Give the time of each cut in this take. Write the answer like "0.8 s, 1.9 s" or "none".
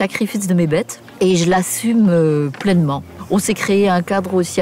1.0 s, 3.2 s